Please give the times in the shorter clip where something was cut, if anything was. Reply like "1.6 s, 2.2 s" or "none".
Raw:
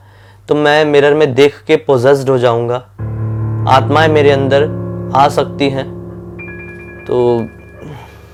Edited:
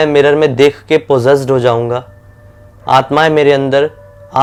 none